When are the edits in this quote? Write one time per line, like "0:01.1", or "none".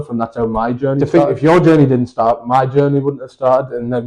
0:01.0